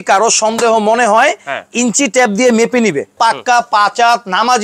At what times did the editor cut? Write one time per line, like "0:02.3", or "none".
0:03.1